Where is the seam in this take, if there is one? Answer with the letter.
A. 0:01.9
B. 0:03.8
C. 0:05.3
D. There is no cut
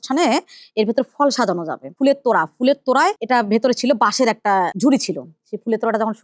A